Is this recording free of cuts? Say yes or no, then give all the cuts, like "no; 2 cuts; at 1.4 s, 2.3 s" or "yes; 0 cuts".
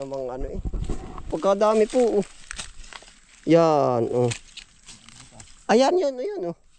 no; 1 cut; at 1.3 s